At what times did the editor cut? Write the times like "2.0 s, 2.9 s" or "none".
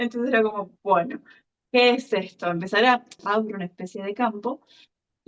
3.1 s